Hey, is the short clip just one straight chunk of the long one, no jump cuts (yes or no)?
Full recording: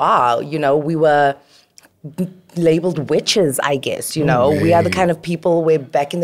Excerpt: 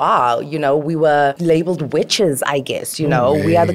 no